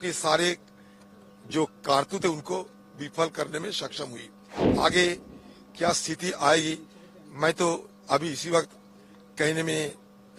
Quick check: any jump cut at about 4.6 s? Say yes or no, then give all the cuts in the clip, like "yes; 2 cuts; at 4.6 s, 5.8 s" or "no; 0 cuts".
yes; 1 cut; at 4.6 s